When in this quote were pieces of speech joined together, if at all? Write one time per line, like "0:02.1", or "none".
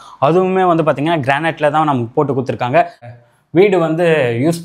0:03.0